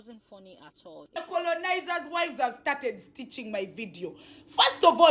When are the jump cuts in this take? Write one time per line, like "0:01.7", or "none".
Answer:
0:01.2